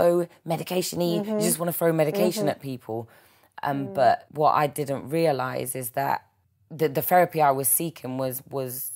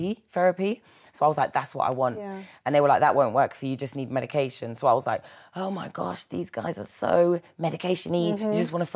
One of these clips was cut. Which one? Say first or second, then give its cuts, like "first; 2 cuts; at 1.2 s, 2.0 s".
first; 2 cuts; at 4.3 s, 6.4 s